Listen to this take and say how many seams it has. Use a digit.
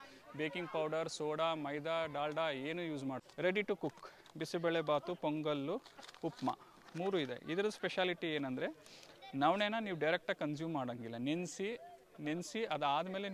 1